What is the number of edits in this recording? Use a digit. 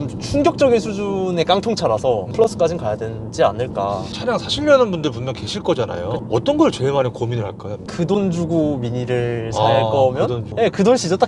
0